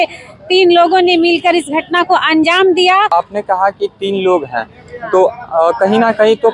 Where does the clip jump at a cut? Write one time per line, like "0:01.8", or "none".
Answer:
0:03.1